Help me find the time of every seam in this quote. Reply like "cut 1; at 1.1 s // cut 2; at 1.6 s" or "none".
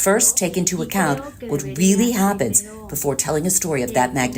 none